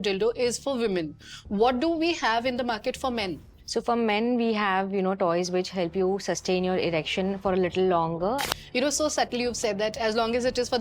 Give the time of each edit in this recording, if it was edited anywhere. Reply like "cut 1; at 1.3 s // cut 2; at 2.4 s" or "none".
cut 1; at 8.4 s